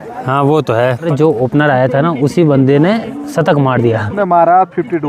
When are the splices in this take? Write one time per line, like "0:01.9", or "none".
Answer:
0:01.1
0:04.1